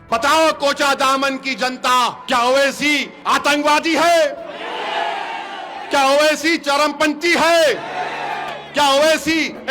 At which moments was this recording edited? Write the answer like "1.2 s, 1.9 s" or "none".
2.2 s, 3.1 s